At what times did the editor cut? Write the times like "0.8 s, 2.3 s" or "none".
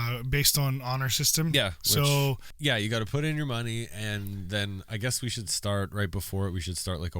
2.5 s